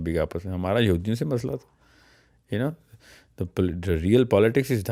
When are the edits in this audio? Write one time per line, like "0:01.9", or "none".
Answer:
none